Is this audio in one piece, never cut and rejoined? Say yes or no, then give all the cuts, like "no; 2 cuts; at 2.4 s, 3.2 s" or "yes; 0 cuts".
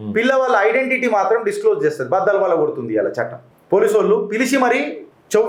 yes; 0 cuts